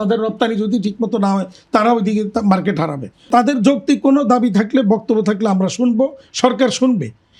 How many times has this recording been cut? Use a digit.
1